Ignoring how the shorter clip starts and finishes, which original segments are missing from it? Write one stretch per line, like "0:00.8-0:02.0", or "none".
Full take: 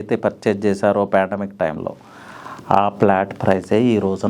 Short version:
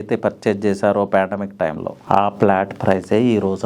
0:01.9-0:02.5